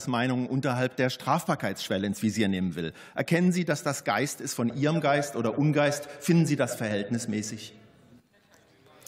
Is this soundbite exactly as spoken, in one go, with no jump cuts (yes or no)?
yes